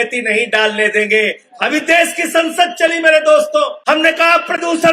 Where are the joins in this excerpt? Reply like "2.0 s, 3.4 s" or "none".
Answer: 1.4 s, 3.8 s